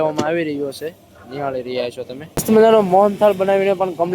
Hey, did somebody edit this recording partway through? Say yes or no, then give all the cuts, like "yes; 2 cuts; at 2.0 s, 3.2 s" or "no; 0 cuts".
yes; 1 cut; at 2.4 s